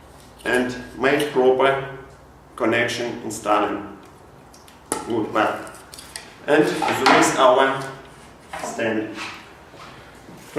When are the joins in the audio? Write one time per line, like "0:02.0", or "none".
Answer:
none